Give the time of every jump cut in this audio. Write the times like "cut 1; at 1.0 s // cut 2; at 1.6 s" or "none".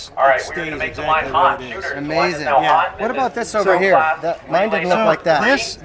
none